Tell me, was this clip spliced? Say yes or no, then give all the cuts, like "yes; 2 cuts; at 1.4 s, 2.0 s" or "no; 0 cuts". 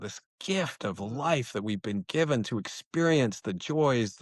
no; 0 cuts